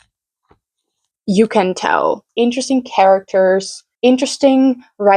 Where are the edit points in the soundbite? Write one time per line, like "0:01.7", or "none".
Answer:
0:02.2